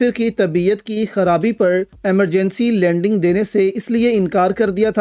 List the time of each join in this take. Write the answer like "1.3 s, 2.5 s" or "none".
none